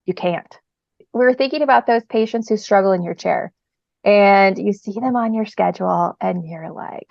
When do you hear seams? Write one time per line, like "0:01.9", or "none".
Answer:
0:01.0